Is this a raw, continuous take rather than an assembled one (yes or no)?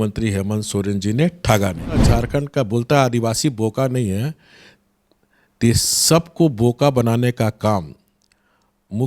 no